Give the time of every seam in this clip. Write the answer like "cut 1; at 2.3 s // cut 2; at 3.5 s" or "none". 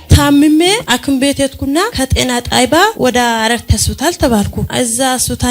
cut 1; at 0.8 s // cut 2; at 1.9 s // cut 3; at 2.9 s // cut 4; at 4.6 s